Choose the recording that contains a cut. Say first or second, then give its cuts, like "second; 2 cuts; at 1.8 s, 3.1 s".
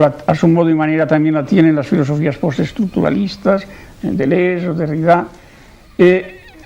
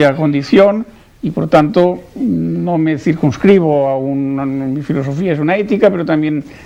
first; 1 cut; at 1.4 s